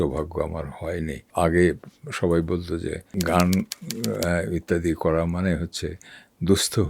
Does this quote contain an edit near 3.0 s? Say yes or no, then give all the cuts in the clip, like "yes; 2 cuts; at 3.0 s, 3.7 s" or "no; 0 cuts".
yes; 2 cuts; at 1.2 s, 3.0 s